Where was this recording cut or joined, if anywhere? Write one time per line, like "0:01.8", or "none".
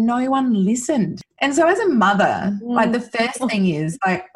0:01.2